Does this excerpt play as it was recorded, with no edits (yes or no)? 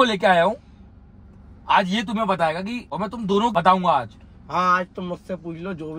yes